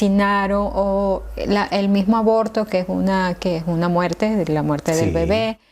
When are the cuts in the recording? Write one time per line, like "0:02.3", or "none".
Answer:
none

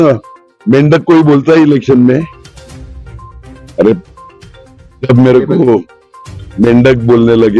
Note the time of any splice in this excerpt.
none

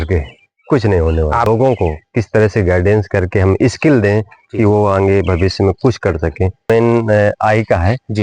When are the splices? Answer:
0:01.5
0:06.7

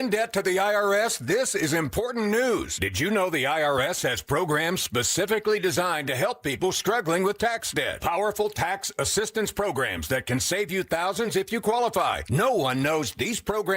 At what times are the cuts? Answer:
0:10.7

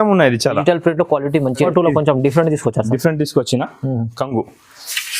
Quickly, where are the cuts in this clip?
0:01.6

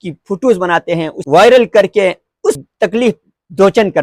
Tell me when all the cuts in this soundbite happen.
0:01.2
0:02.6

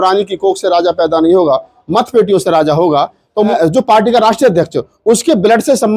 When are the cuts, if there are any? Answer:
0:03.5

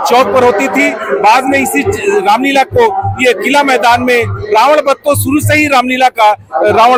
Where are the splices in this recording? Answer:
none

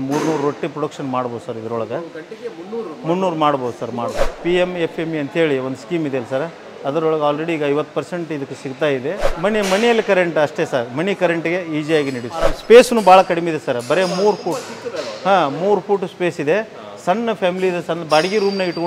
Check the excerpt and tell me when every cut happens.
0:04.3
0:09.3
0:12.5

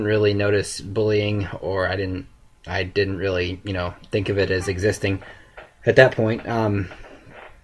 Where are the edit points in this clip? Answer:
0:03.6

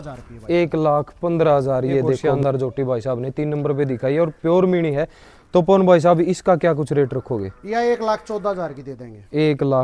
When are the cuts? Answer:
0:02.3

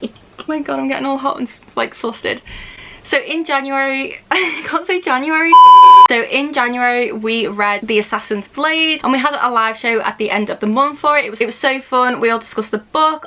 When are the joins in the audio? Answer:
none

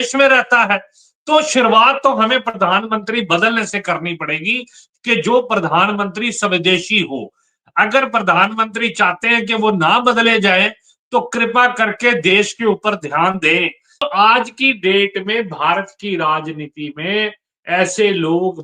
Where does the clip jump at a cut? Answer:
0:14.1

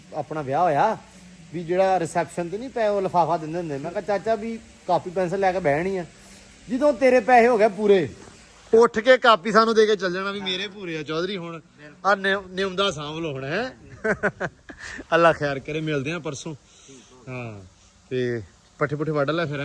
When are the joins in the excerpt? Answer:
none

